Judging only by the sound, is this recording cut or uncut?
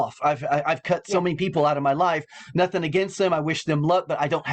uncut